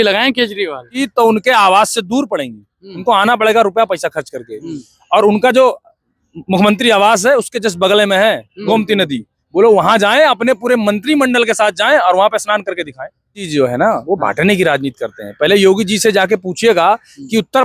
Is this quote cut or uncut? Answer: cut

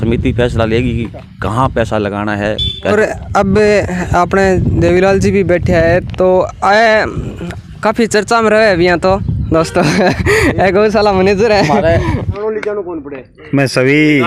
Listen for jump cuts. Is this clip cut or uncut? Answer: uncut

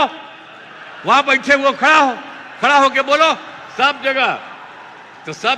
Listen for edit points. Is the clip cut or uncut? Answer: uncut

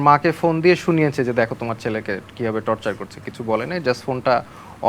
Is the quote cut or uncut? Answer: uncut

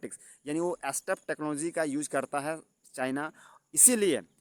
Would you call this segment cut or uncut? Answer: uncut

